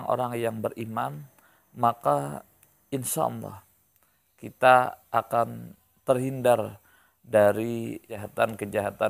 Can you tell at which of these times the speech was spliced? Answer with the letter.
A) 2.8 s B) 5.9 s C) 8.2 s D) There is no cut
C